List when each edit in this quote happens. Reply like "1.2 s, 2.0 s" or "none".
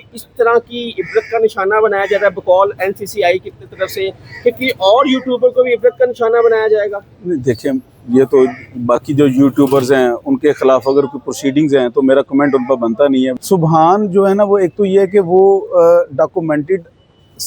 13.3 s